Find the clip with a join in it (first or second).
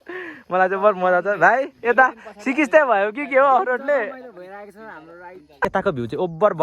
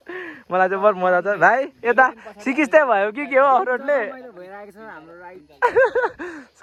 first